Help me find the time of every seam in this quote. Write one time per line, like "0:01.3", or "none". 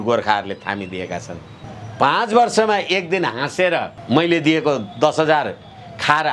0:01.7
0:04.0

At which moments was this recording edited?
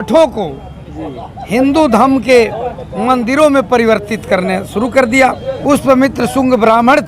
0:05.5

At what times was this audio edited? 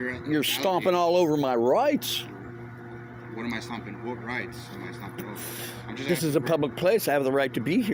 none

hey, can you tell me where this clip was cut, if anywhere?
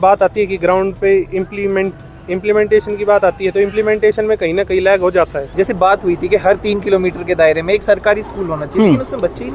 0:05.4

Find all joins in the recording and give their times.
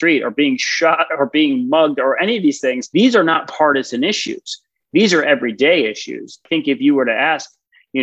0:02.8
0:06.4

